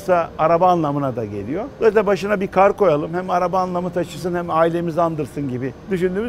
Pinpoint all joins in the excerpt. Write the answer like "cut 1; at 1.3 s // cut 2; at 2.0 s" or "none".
none